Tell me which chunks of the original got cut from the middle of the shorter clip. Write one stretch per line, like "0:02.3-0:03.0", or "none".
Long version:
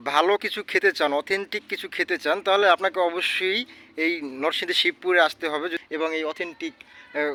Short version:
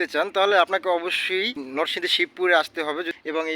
0:03.7-0:04.3